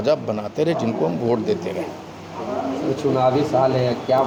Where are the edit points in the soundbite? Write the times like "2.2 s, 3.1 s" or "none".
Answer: none